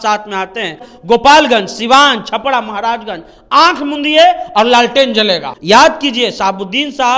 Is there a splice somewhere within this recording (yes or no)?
yes